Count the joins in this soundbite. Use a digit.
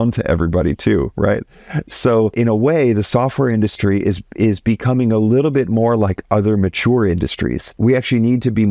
2